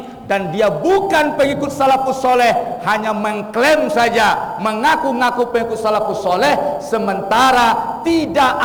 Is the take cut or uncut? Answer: uncut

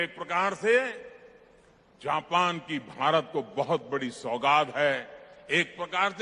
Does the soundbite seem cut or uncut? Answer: uncut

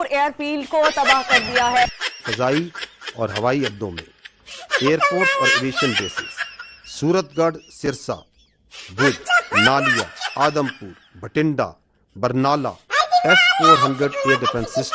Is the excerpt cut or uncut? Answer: uncut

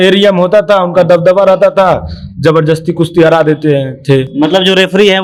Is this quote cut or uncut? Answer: uncut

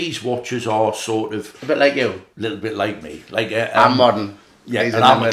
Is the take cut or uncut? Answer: cut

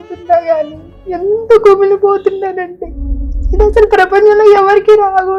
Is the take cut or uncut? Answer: uncut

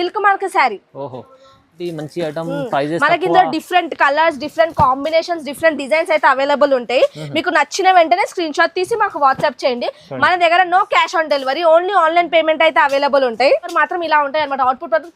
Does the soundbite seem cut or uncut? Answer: cut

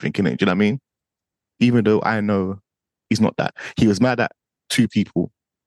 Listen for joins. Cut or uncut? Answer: cut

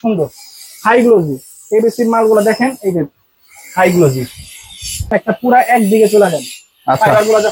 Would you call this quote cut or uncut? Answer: cut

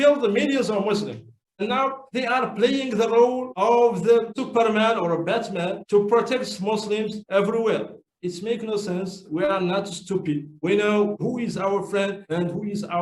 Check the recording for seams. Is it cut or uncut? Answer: cut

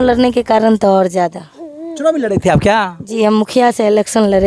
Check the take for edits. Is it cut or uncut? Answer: uncut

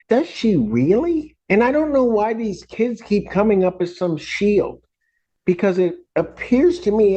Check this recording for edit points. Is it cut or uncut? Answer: cut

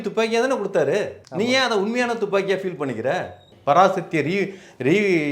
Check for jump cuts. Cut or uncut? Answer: cut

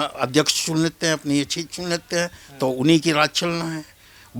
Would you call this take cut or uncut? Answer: uncut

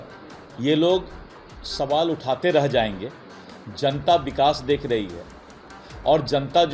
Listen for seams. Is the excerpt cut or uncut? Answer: uncut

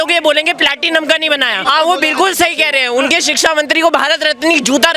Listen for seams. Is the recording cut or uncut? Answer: cut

